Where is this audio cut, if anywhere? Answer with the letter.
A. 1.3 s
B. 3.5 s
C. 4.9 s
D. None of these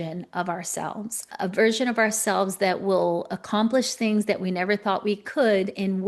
A